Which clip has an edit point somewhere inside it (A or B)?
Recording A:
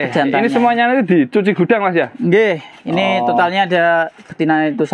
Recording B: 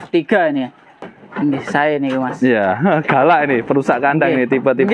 B